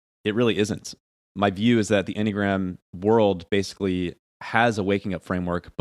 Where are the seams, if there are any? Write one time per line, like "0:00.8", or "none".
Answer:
0:01.1